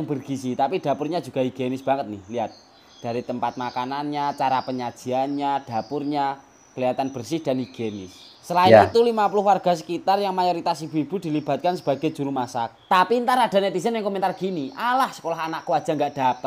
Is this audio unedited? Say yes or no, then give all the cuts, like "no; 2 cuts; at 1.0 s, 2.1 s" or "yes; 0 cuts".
yes; 0 cuts